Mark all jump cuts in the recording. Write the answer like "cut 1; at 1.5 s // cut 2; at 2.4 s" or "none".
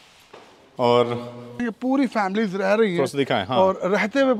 cut 1; at 1.6 s